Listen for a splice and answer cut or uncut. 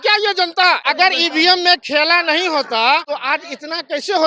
cut